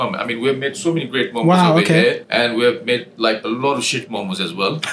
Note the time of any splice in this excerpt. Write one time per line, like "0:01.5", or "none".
0:02.2